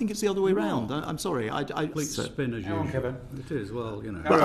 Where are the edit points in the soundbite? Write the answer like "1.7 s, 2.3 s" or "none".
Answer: 1.9 s